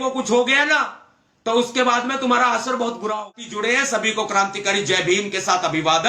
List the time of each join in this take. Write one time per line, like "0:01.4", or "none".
0:03.4